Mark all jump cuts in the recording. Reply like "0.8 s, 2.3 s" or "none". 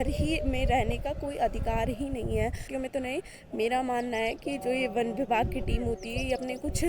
2.7 s